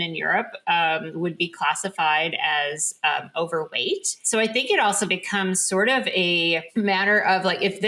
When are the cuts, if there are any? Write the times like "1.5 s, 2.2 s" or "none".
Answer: 4.1 s, 6.7 s

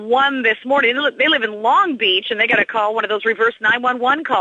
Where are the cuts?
none

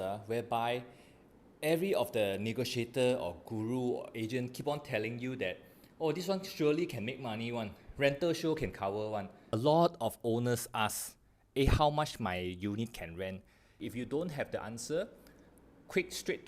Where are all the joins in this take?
9.4 s, 13.7 s

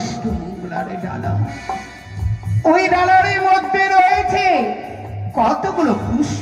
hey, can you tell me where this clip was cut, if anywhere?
none

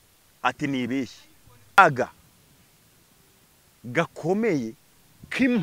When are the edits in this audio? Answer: 1.8 s

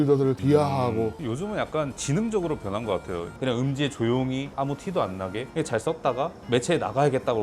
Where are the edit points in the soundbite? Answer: 1.2 s, 4.5 s, 5.5 s

